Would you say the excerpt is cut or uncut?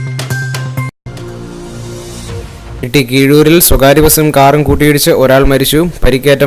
cut